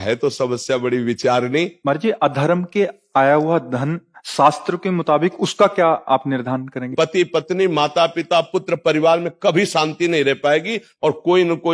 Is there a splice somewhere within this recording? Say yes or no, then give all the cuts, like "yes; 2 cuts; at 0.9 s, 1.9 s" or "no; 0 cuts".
yes; 2 cuts; at 1.8 s, 6.9 s